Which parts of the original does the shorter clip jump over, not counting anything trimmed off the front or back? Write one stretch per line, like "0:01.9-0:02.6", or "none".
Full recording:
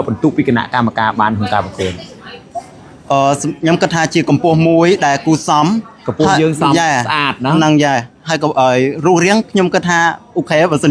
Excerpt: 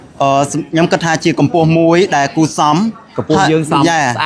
none